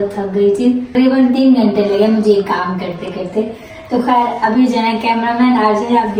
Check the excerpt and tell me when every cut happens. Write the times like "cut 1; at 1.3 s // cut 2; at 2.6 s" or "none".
none